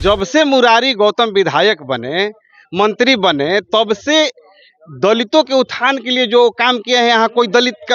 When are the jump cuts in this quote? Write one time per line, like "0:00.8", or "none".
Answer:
none